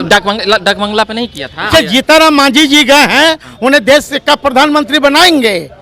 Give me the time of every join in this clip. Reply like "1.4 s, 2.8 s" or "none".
1.7 s